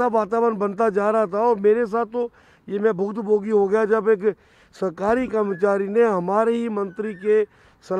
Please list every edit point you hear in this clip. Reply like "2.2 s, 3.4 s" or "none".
none